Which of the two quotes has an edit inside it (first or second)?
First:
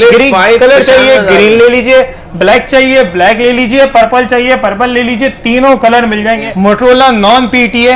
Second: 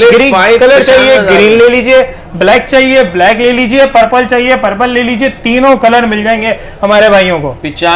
first